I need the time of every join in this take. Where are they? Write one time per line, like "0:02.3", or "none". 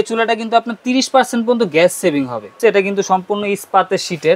0:02.6

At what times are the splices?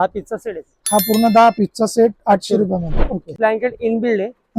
0:03.3

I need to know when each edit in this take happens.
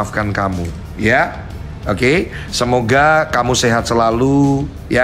none

